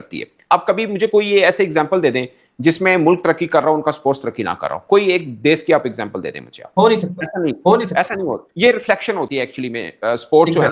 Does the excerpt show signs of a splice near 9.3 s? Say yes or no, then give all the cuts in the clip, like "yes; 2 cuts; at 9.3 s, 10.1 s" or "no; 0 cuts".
no; 0 cuts